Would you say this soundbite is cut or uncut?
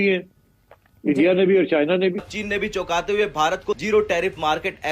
cut